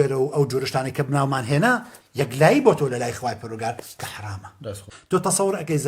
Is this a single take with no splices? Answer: no; 1 cut; at 4.9 s

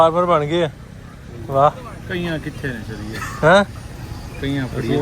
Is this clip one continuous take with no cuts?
yes; 0 cuts

